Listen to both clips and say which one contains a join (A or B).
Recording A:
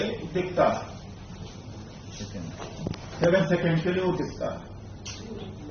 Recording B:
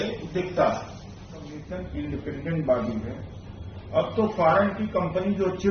B